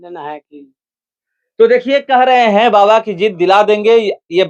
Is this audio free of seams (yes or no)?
yes